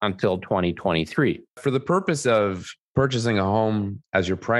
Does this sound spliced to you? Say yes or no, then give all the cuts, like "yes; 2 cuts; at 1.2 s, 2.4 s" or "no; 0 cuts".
yes; 1 cut; at 1.6 s